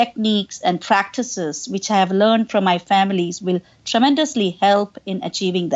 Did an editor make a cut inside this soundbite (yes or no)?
no